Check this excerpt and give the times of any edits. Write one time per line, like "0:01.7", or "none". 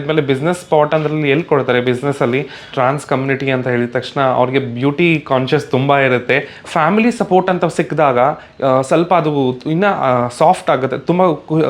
0:02.7
0:06.7